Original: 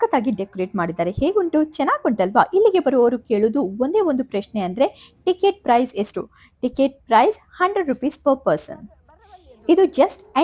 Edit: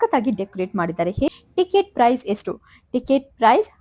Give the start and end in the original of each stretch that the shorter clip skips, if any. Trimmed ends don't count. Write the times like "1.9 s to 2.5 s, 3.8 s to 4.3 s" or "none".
1.3 s to 5.0 s